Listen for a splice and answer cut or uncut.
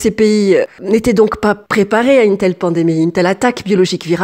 uncut